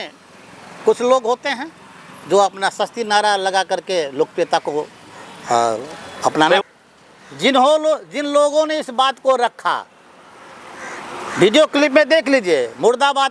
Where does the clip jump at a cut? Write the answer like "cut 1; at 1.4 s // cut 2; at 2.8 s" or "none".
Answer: cut 1; at 6.6 s